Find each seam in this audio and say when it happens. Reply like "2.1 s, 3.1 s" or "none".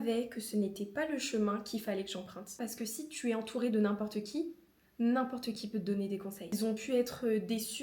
2.5 s, 6.4 s